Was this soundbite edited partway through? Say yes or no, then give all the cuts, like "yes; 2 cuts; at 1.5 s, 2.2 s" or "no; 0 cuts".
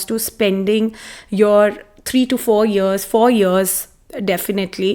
no; 0 cuts